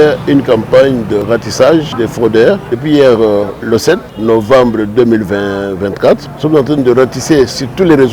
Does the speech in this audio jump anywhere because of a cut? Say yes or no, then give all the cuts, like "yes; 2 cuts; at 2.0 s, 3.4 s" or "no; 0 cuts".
yes; 4 cuts; at 1.2 s, 2.5 s, 4.1 s, 6.3 s